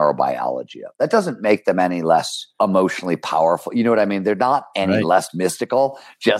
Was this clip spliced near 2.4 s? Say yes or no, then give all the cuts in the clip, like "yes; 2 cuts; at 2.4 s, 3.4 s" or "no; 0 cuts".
yes; 1 cut; at 2.4 s